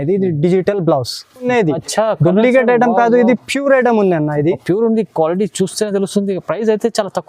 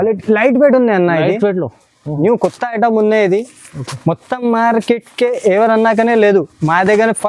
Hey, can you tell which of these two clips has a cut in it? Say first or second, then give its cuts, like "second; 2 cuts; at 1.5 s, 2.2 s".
first; 1 cut; at 1.5 s